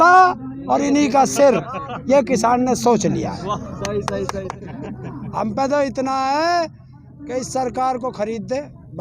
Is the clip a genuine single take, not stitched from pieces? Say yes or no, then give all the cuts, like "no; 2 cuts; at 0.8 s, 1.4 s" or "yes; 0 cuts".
no; 1 cut; at 4.5 s